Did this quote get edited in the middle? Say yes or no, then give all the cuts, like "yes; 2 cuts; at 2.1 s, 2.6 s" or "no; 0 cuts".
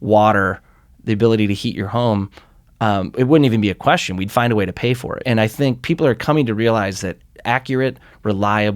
yes; 1 cut; at 5.2 s